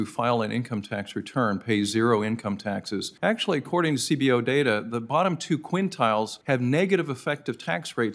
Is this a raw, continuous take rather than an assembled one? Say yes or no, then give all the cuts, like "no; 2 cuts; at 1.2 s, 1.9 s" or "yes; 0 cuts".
no; 1 cut; at 3.1 s